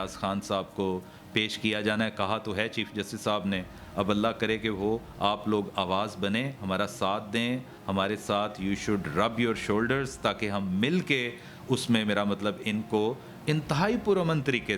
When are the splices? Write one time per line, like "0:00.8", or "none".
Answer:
none